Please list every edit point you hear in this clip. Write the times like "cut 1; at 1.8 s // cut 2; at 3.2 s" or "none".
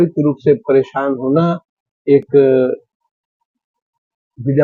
none